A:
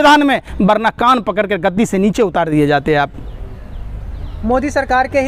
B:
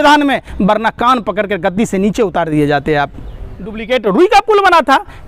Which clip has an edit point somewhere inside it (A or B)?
B